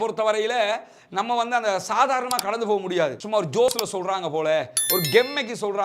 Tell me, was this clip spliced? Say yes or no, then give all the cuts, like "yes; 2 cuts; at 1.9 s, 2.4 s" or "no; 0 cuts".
no; 0 cuts